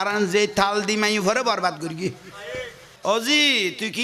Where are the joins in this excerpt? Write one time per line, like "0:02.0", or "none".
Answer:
0:02.9